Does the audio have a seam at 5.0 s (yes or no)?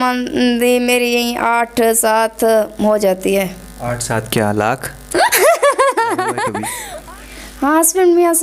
no